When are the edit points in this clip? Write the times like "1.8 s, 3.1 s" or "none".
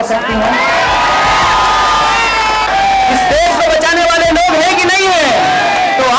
2.7 s